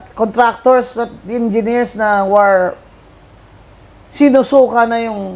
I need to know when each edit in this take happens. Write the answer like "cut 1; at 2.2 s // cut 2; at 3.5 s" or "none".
none